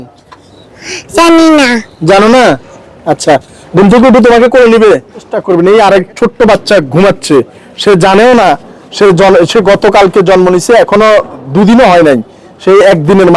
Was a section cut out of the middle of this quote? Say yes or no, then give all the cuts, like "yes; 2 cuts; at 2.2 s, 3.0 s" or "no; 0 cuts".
yes; 1 cut; at 5.4 s